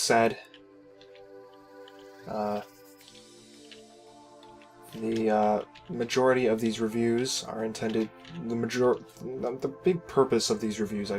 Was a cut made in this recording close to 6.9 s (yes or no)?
yes